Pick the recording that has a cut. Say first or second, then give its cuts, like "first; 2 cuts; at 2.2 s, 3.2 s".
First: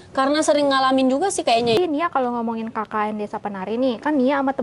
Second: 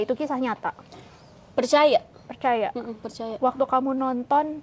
first; 1 cut; at 1.8 s